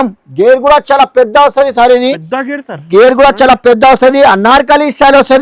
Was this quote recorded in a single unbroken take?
yes; 0 cuts

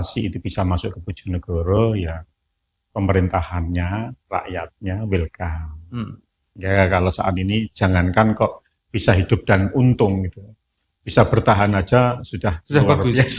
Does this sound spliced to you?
yes; 1 cut; at 6.5 s

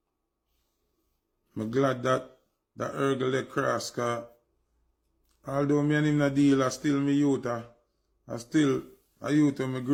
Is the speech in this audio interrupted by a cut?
no; 0 cuts

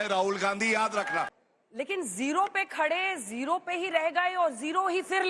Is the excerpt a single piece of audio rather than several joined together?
no; 1 cut; at 1.3 s

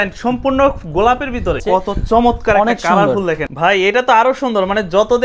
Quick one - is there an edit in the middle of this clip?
yes; 2 cuts; at 1.6 s, 3.4 s

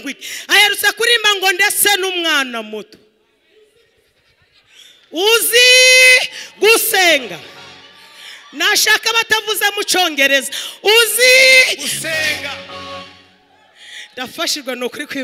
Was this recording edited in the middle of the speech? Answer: no; 0 cuts

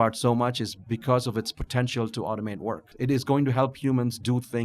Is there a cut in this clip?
yes; 1 cut; at 2.9 s

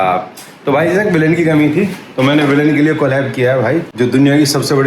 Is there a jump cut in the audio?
yes; 1 cut; at 3.9 s

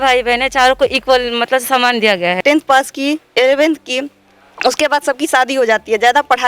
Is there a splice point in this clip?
yes; 1 cut; at 2.4 s

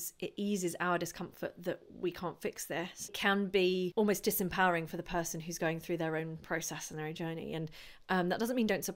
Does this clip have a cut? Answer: yes; 2 cuts; at 3.1 s, 3.9 s

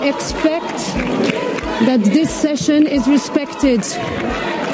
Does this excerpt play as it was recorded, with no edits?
no; 1 cut; at 3.8 s

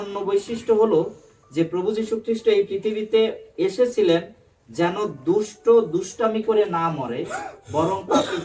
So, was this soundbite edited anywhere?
no; 0 cuts

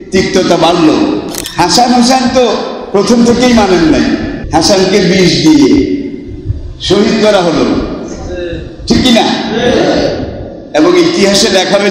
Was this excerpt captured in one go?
no; 2 cuts; at 1.4 s, 4.4 s

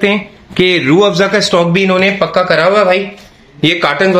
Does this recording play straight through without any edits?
yes; 0 cuts

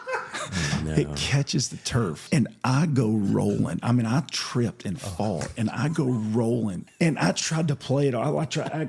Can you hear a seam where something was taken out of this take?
yes; 2 cuts; at 2.2 s, 6.8 s

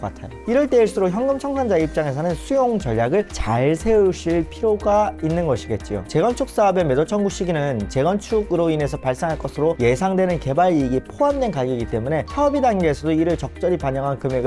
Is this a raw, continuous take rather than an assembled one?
no; 1 cut; at 6.1 s

